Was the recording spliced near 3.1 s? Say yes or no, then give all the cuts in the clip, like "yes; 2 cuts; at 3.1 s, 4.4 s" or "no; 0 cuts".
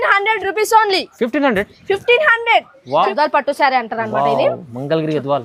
yes; 1 cut; at 3.1 s